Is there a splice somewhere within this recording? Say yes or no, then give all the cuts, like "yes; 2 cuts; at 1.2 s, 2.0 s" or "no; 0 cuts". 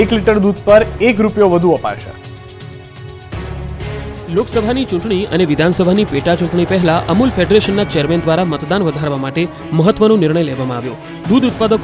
no; 0 cuts